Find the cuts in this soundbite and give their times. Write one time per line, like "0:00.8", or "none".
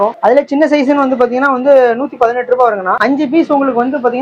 0:03.0